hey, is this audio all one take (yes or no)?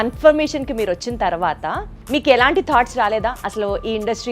no